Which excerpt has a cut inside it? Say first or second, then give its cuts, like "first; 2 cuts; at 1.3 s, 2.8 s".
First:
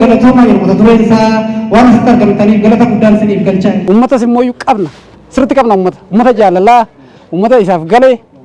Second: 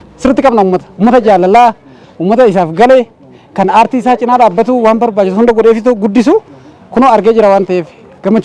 first; 1 cut; at 3.8 s